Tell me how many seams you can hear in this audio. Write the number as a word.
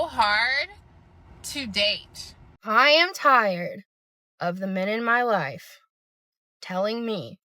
one